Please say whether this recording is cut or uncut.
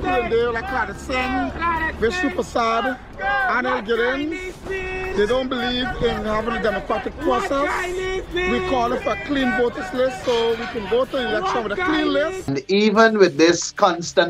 cut